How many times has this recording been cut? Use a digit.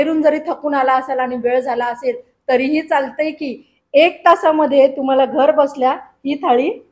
0